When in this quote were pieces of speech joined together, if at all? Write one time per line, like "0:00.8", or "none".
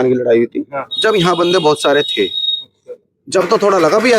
none